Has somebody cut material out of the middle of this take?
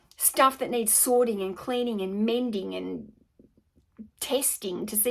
no; 0 cuts

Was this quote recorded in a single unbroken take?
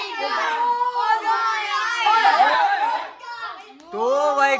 yes; 0 cuts

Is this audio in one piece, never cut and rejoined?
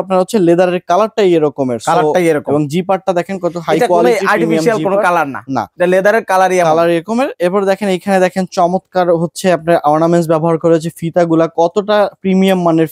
yes; 0 cuts

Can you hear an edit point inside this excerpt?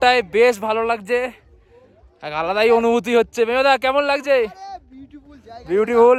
no; 0 cuts

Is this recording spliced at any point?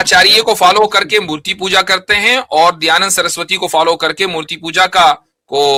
no; 0 cuts

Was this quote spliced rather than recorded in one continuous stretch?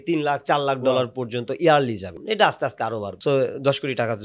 yes; 2 cuts; at 2.1 s, 3.1 s

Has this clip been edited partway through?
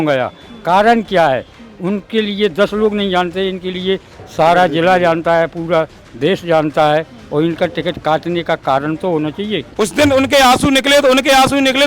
yes; 1 cut; at 9.6 s

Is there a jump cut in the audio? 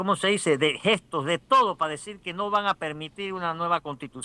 no; 0 cuts

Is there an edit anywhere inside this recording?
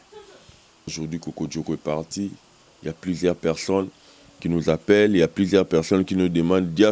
yes; 1 cut; at 0.9 s

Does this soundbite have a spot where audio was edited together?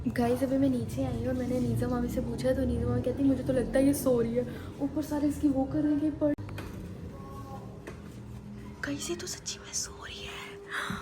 yes; 1 cut; at 6.3 s

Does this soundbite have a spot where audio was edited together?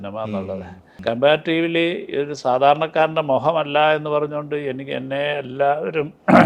yes; 1 cut; at 0.9 s

